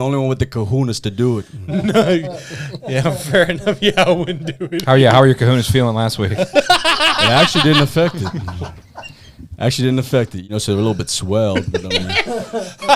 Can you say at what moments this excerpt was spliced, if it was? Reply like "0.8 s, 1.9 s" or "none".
10.4 s